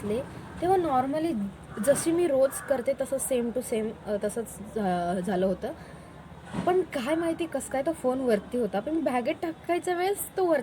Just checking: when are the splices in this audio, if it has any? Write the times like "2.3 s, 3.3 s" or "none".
none